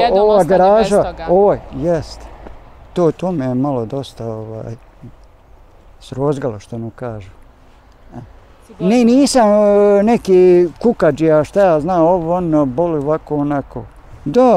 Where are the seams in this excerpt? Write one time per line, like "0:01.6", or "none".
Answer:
0:08.7